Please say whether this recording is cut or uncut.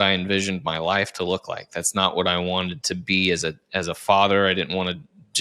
uncut